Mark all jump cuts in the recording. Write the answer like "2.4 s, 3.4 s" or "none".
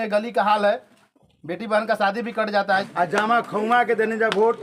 2.9 s